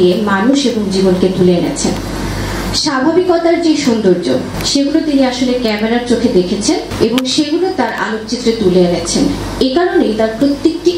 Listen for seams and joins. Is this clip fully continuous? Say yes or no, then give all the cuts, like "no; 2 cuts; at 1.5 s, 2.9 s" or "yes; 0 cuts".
no; 2 cuts; at 4.6 s, 6.9 s